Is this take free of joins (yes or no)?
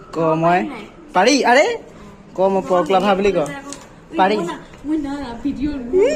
yes